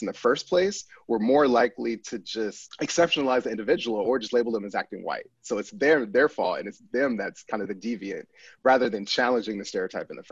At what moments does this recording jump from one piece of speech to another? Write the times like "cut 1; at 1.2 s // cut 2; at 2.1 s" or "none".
cut 1; at 2.6 s

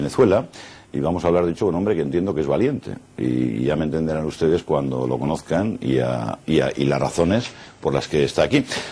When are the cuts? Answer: cut 1; at 6.1 s

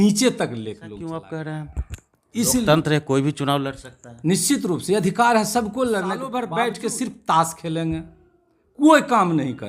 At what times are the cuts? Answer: cut 1; at 0.9 s // cut 2; at 6.3 s

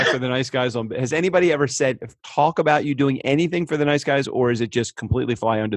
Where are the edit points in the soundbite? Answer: cut 1; at 2.2 s

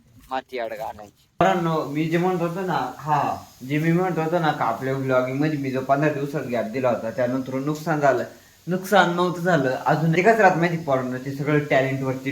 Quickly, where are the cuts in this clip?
cut 1; at 1.4 s // cut 2; at 10.1 s

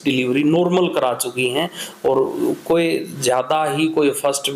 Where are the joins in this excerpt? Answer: none

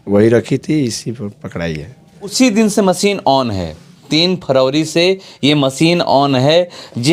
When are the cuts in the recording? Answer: cut 1; at 2.3 s

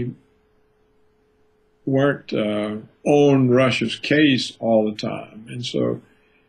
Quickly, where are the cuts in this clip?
cut 1; at 2.2 s

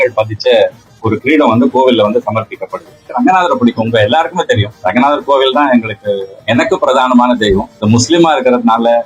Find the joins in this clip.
cut 1; at 3.1 s // cut 2; at 4.7 s // cut 3; at 7.7 s

